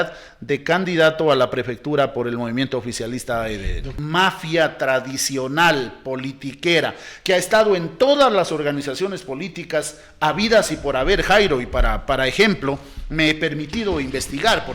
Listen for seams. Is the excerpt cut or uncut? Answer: cut